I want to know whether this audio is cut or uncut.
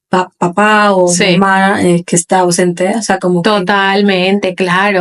uncut